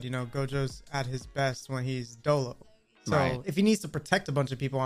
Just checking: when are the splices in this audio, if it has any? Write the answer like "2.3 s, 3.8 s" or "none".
3.4 s